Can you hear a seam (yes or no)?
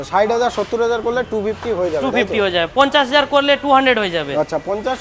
no